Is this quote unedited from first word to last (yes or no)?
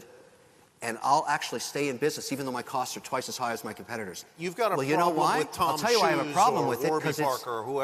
no